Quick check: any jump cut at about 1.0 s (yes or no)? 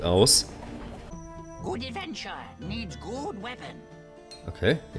yes